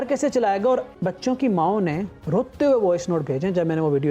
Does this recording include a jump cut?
yes; 1 cut; at 0.9 s

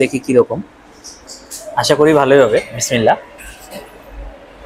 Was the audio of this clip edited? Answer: no; 0 cuts

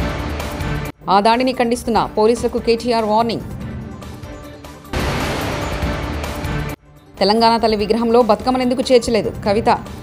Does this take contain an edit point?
no; 0 cuts

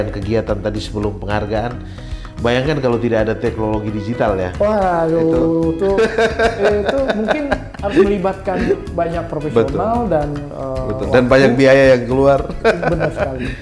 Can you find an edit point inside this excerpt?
no; 0 cuts

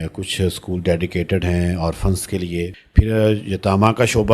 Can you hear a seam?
yes; 1 cut; at 2.8 s

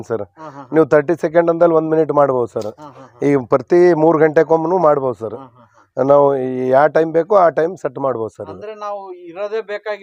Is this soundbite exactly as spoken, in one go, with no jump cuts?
yes; 0 cuts

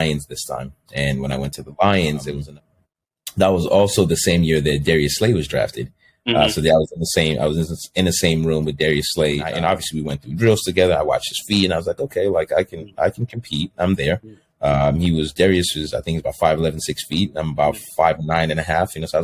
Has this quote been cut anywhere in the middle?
yes; 2 cuts; at 2.4 s, 9.5 s

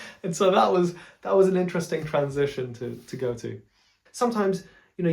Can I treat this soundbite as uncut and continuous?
no; 1 cut; at 3.6 s

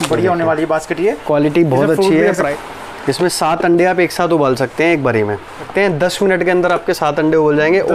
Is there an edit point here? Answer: yes; 2 cuts; at 2.5 s, 5.6 s

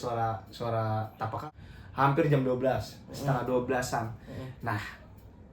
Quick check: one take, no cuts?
no; 1 cut; at 1.6 s

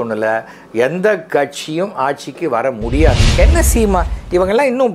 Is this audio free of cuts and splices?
no; 1 cut; at 3.2 s

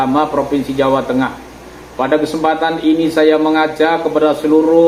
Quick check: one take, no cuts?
yes; 0 cuts

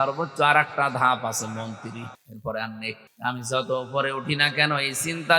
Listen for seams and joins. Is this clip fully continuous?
no; 2 cuts; at 2.2 s, 3.1 s

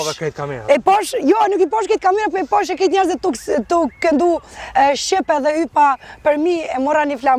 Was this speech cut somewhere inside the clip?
no; 0 cuts

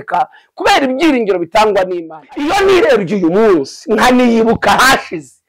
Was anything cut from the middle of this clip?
yes; 1 cut; at 2.1 s

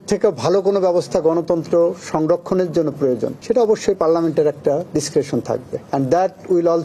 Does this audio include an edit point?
no; 0 cuts

